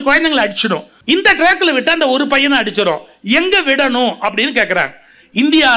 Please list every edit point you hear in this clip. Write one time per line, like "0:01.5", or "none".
0:00.9

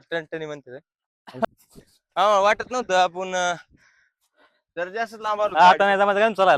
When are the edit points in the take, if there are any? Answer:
0:01.4

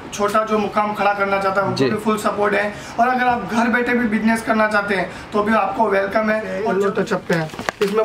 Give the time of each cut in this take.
0:06.6

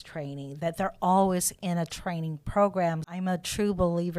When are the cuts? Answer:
0:03.1

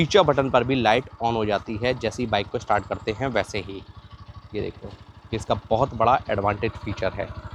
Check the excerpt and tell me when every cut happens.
none

